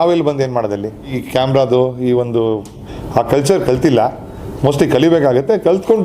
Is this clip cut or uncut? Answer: cut